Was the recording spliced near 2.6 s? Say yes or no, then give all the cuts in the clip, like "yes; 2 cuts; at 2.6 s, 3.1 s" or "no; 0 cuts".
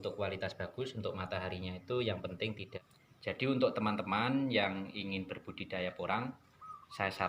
yes; 1 cut; at 2.6 s